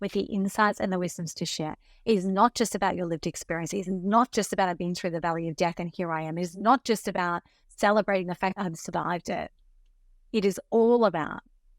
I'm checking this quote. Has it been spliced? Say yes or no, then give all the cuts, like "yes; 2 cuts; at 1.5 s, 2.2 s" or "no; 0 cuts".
no; 0 cuts